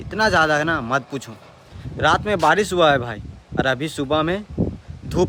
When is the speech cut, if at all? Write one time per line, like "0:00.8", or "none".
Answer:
none